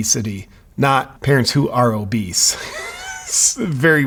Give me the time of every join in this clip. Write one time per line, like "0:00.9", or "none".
none